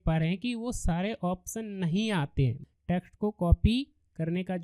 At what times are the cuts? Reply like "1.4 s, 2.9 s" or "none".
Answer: 2.6 s